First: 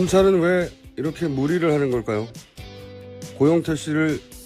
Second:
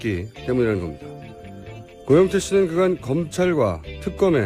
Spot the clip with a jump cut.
first; 1 cut; at 1.9 s

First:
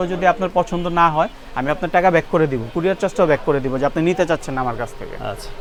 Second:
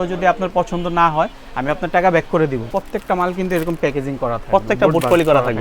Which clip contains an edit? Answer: second; 1 cut; at 2.7 s

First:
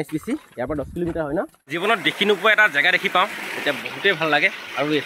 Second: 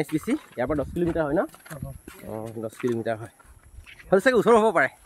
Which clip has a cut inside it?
first; 1 cut; at 1.8 s

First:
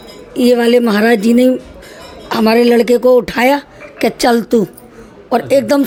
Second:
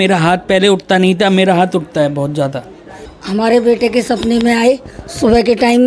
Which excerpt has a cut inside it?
second; 1 cut; at 3.0 s

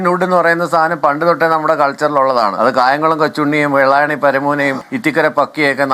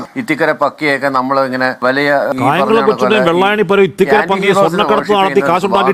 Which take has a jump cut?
first; 1 cut; at 2.5 s

